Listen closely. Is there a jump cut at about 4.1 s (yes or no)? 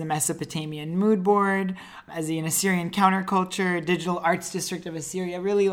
no